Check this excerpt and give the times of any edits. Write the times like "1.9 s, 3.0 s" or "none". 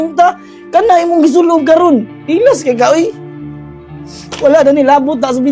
none

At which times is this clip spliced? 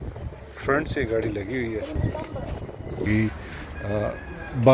3.1 s

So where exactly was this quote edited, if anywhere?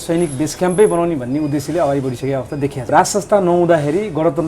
2.9 s

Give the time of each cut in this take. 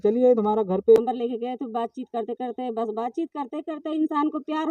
1.0 s

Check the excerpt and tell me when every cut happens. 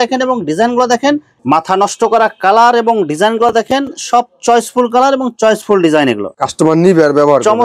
1.3 s, 6.3 s

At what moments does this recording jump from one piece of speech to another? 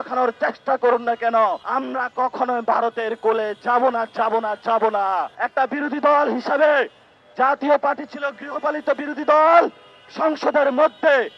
1.6 s, 5.4 s

